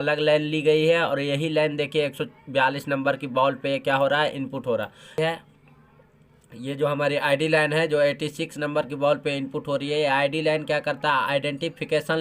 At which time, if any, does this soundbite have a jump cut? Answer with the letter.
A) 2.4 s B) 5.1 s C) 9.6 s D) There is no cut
B